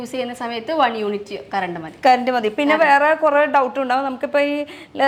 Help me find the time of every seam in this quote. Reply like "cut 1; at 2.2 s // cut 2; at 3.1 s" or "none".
none